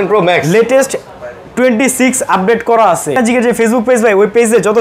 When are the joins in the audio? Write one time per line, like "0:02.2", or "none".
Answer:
0:03.2